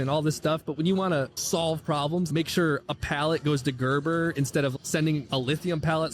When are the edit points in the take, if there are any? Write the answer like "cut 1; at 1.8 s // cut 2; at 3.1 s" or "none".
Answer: cut 1; at 1.4 s // cut 2; at 2.3 s // cut 3; at 5.2 s